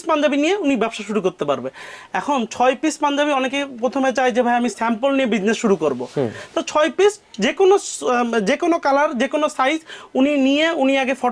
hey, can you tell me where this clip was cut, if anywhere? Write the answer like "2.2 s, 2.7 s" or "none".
none